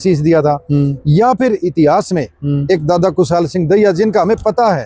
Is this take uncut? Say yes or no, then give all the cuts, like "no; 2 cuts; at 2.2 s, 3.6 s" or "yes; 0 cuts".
yes; 0 cuts